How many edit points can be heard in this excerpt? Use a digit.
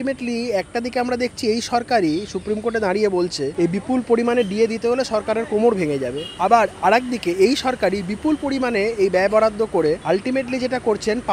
3